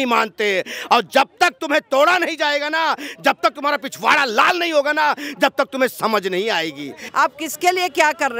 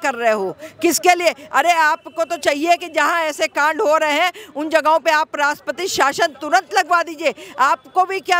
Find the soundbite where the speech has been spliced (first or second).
first